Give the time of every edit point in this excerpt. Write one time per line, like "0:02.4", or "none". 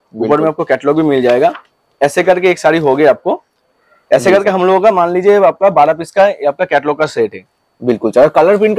none